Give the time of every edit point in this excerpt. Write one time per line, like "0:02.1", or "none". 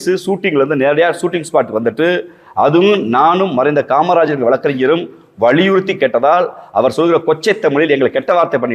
none